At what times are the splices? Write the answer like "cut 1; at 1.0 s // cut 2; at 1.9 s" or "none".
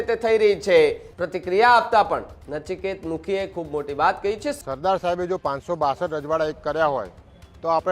cut 1; at 1.1 s // cut 2; at 4.6 s